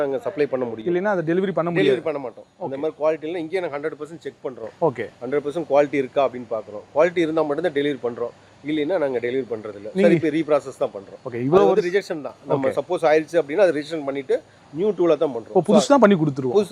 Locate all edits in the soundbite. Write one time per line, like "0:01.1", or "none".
none